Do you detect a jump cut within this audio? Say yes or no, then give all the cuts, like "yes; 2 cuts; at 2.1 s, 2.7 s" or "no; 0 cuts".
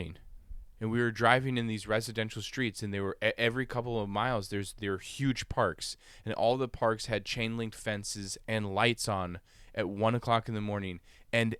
no; 0 cuts